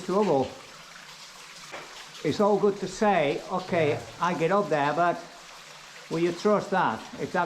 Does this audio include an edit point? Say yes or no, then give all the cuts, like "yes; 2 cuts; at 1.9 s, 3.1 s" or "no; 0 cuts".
yes; 1 cut; at 1.7 s